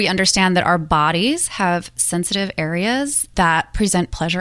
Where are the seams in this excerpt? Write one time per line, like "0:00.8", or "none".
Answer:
0:03.3